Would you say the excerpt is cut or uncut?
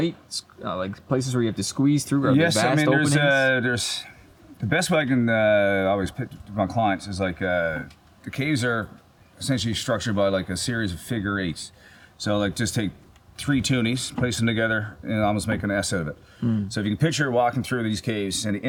uncut